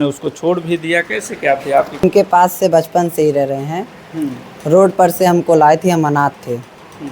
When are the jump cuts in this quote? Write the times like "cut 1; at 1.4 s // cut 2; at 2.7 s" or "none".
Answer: cut 1; at 2.0 s